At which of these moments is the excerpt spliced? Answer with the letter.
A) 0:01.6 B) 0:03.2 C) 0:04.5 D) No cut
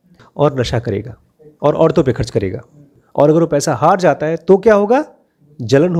D